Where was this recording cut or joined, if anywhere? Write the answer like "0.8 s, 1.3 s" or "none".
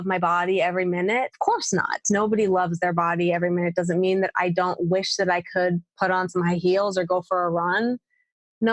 1.3 s